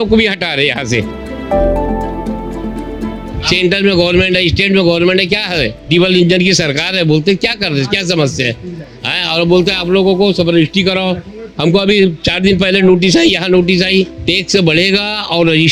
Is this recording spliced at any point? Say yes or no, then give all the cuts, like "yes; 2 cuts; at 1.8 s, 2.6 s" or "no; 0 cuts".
no; 0 cuts